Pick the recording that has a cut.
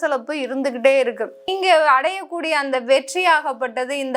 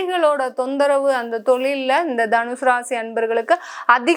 first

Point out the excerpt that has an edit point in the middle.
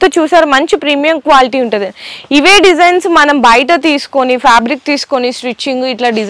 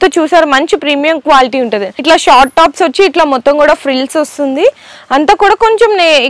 second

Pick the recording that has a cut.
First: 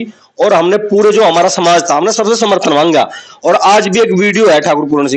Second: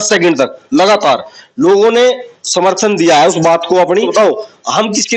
second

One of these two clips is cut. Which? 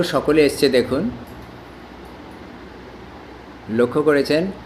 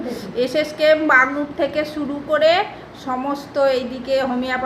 second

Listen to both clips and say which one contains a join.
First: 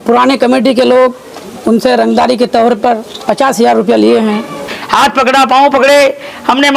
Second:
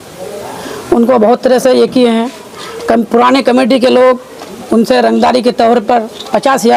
first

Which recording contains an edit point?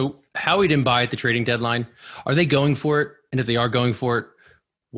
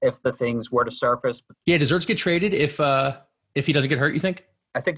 second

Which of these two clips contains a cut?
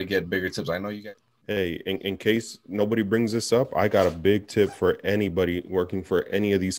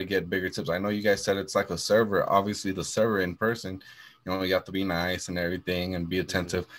first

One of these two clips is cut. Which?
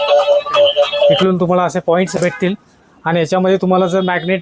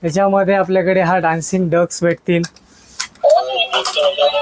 first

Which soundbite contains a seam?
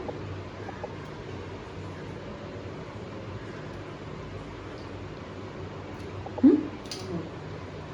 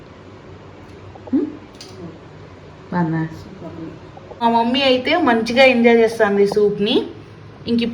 second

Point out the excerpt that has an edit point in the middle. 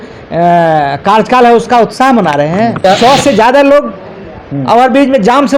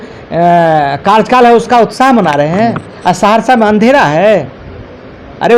first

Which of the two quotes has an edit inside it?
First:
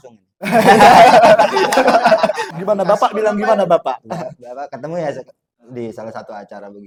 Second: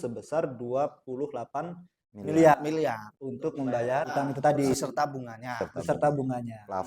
second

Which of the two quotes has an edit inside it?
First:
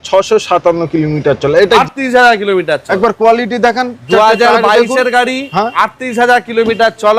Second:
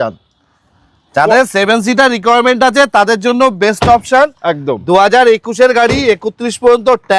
first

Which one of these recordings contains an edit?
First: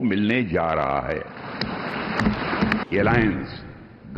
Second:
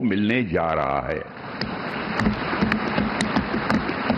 first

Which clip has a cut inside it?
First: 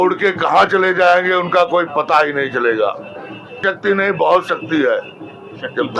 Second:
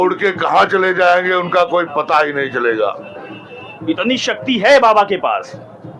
first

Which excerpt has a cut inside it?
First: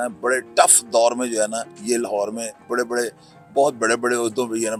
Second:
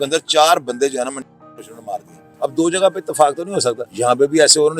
second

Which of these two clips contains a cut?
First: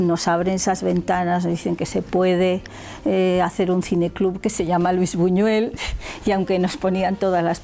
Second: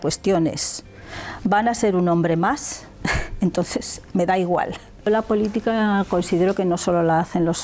second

